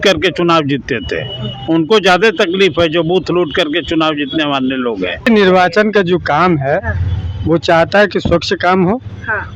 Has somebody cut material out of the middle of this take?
yes; 1 cut; at 5.2 s

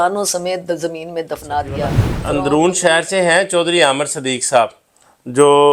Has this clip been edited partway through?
yes; 1 cut; at 2.1 s

